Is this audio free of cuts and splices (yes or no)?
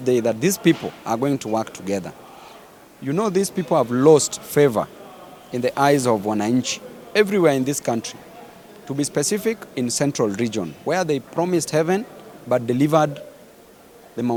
yes